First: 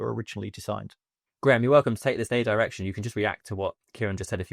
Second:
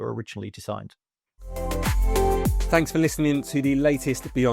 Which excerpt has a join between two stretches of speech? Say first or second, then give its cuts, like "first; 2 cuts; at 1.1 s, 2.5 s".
second; 1 cut; at 1.3 s